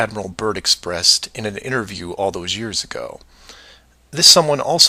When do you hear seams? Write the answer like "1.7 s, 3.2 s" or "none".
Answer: 1.1 s